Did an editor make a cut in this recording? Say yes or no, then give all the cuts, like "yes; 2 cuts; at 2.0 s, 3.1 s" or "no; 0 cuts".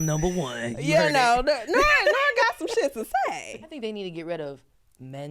yes; 1 cut; at 3.7 s